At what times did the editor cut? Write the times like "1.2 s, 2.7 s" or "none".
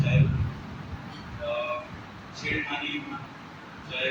none